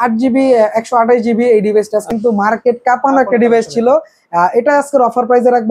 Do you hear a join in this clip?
yes; 1 cut; at 2.0 s

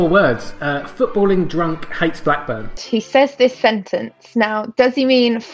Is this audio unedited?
no; 1 cut; at 2.8 s

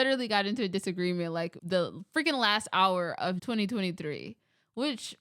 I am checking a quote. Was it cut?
yes; 2 cuts; at 1.6 s, 3.4 s

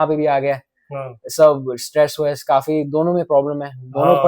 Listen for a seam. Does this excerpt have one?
no; 0 cuts

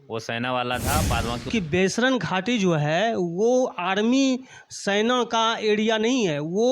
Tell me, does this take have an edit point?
yes; 1 cut; at 1.5 s

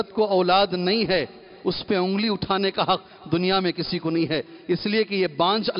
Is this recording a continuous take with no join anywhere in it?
yes; 0 cuts

